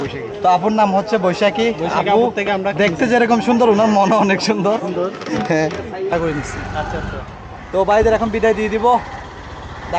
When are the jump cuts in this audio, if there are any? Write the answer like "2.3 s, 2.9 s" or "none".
6.1 s